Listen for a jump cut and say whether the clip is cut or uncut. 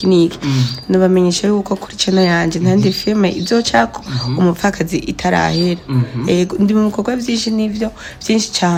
uncut